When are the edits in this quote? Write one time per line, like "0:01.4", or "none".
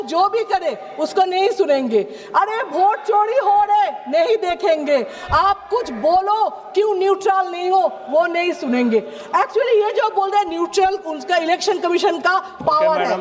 none